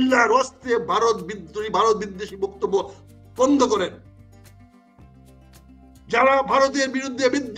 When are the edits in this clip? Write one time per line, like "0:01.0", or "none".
0:04.2
0:06.0